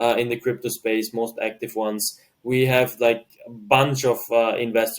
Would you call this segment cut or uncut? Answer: uncut